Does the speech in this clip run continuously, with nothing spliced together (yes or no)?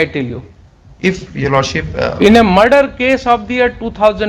yes